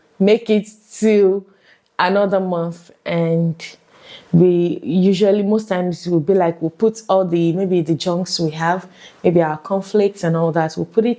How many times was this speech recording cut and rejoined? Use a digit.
0